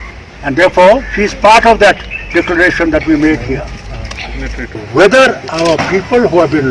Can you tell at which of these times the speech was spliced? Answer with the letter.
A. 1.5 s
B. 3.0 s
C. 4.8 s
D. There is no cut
C